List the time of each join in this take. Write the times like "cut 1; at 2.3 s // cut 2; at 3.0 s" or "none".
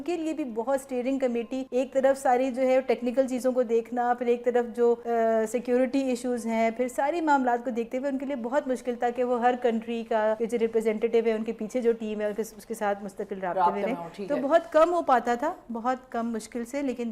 cut 1; at 1.6 s // cut 2; at 5.0 s // cut 3; at 10.4 s